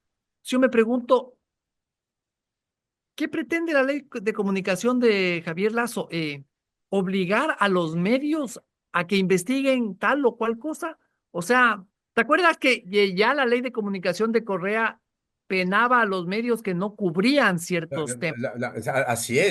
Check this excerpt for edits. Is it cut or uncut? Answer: uncut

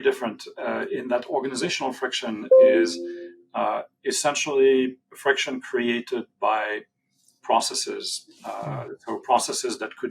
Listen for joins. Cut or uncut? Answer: uncut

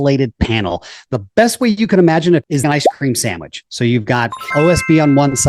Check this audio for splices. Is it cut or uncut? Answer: cut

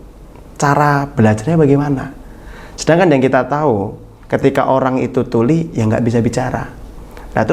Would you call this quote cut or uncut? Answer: cut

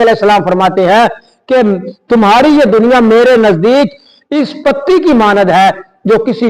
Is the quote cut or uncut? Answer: uncut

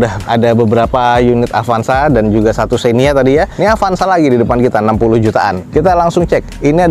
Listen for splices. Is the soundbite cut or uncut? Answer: uncut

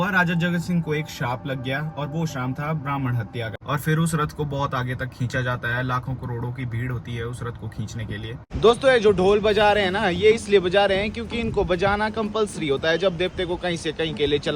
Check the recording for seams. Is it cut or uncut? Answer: cut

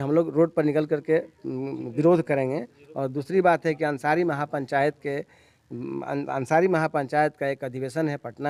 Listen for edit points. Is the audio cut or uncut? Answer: uncut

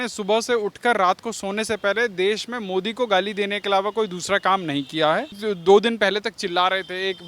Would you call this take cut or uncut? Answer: cut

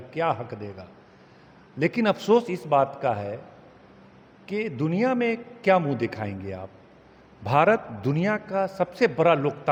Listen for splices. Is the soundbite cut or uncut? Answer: uncut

